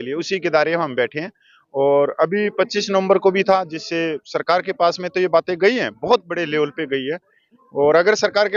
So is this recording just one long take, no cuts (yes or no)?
yes